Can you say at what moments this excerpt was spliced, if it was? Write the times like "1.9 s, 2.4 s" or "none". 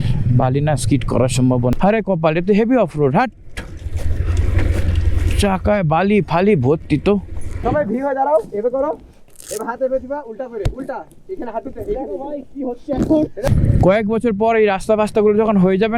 1.7 s, 7.6 s, 13.5 s